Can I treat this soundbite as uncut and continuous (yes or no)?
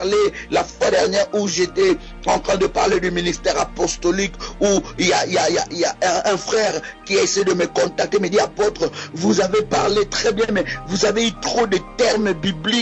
no